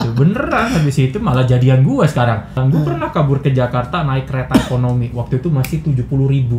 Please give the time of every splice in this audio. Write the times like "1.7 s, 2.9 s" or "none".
2.6 s